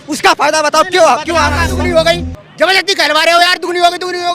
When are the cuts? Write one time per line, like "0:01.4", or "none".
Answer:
0:01.7